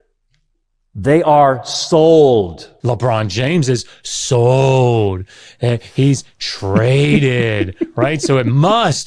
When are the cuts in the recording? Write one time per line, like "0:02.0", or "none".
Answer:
0:02.7